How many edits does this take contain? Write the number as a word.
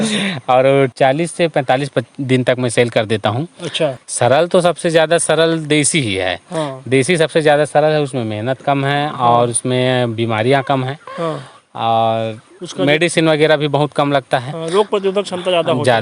two